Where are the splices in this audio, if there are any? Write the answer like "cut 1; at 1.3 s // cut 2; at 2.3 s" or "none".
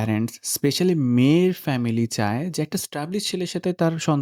none